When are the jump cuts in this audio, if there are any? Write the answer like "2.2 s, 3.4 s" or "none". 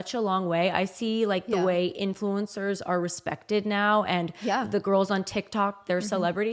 none

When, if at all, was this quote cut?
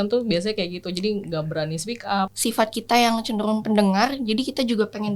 2.3 s

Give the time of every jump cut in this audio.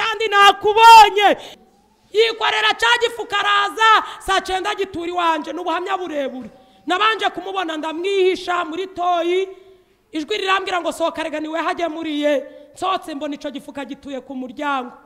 1.5 s

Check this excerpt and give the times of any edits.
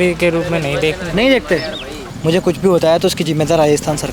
2.1 s

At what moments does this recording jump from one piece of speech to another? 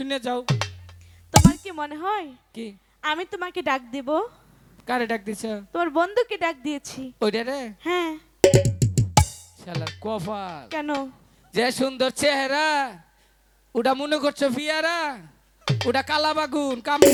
none

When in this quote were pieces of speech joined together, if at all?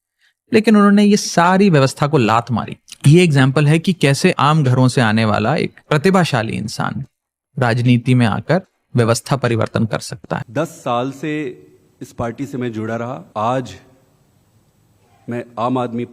10.5 s, 13.2 s

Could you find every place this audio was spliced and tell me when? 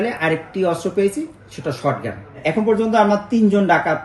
2.4 s

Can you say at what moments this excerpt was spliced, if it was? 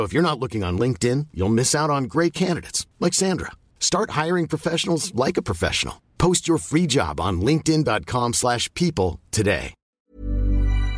10.0 s

